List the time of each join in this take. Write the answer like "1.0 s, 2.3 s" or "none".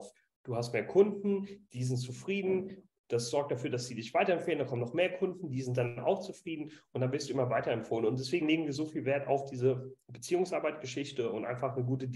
none